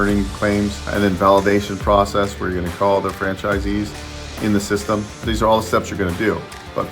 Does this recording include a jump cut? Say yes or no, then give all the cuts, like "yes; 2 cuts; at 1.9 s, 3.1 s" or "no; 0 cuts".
yes; 2 cuts; at 0.9 s, 5.2 s